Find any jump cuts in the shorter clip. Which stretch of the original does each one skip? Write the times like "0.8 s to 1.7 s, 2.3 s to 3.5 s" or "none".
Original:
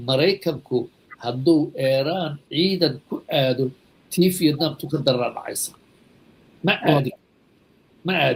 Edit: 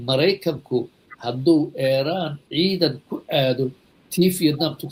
none